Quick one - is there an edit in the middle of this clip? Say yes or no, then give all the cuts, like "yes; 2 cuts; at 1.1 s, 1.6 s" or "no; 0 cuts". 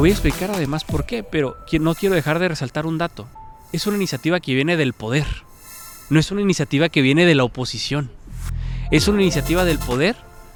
no; 0 cuts